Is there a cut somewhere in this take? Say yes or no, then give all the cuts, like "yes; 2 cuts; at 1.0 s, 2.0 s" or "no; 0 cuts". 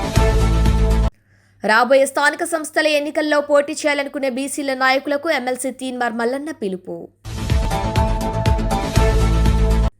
no; 0 cuts